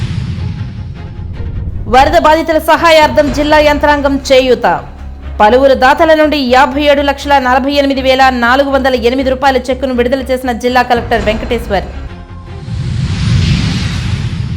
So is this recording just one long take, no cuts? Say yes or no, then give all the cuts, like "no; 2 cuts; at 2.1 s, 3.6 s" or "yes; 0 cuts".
no; 1 cut; at 1.6 s